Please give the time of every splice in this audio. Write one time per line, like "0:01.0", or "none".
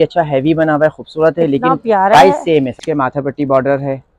0:02.8